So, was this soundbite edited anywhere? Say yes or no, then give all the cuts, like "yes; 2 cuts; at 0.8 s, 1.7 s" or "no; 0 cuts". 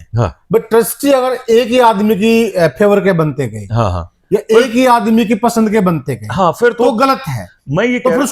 no; 0 cuts